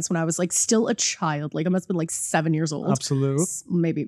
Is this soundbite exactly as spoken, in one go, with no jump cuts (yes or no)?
yes